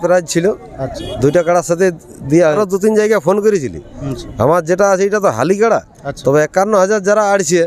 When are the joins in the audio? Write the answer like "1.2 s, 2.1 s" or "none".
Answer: 2.6 s